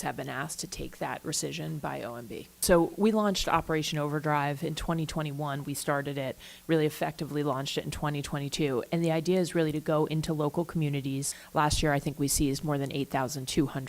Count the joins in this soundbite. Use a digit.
2